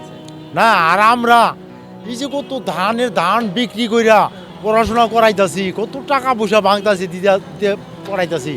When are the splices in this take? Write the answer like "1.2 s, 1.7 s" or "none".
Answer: 4.5 s